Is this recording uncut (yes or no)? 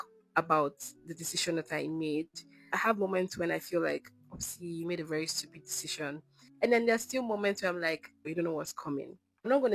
yes